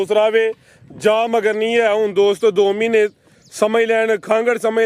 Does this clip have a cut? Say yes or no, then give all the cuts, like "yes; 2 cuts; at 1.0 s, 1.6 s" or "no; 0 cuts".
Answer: no; 0 cuts